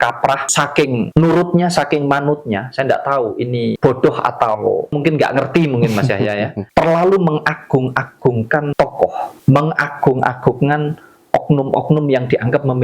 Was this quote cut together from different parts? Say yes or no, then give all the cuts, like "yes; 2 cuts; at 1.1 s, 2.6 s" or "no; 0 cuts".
yes; 5 cuts; at 0.9 s, 3.8 s, 5.0 s, 6.6 s, 8.9 s